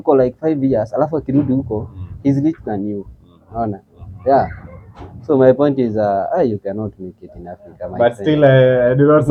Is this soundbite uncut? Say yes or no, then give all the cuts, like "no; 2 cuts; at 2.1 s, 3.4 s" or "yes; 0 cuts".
yes; 0 cuts